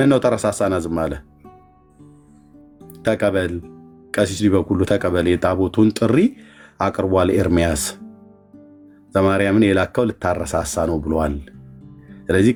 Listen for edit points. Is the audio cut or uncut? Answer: uncut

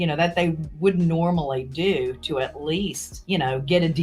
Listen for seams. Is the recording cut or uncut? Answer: cut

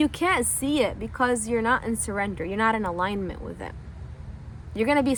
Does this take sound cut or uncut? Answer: uncut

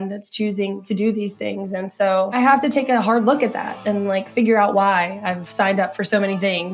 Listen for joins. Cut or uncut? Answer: cut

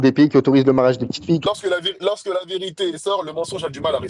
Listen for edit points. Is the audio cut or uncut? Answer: cut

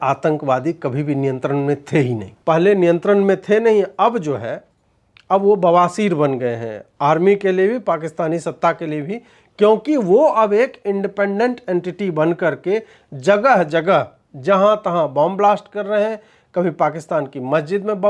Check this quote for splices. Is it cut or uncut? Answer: cut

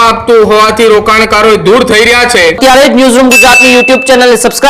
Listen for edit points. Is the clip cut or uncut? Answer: cut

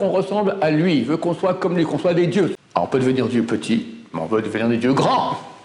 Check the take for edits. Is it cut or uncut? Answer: cut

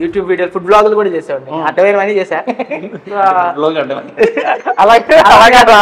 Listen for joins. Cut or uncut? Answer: uncut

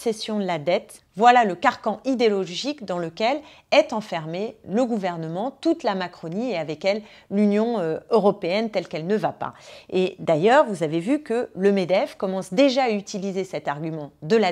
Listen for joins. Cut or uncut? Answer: uncut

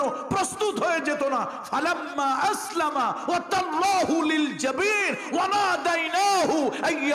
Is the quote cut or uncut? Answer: uncut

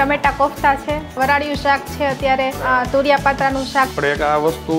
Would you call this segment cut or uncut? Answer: cut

